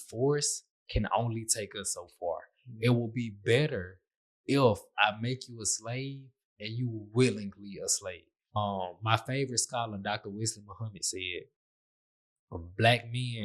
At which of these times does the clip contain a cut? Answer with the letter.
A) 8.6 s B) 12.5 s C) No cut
A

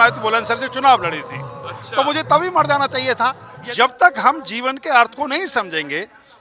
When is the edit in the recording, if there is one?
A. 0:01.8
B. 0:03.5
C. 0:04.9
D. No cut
B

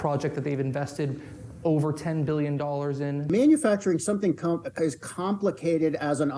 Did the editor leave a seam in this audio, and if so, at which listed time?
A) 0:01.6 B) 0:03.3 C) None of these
B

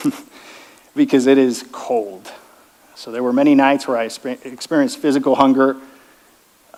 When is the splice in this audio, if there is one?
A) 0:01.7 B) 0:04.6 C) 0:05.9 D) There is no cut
D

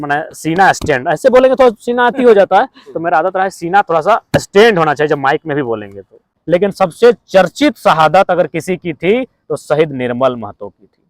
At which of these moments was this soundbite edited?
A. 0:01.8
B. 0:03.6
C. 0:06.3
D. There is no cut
C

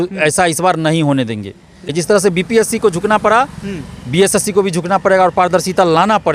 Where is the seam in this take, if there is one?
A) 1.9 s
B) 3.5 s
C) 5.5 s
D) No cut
A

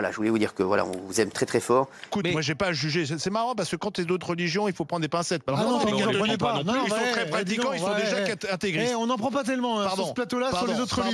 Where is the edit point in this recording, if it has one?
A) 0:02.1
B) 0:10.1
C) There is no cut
A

